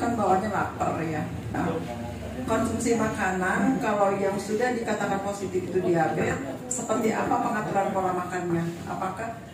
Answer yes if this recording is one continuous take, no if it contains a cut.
no